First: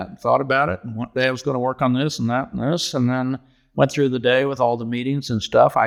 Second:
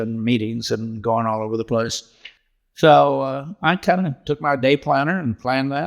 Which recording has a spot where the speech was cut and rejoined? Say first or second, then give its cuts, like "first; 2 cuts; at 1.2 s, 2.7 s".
second; 1 cut; at 2.5 s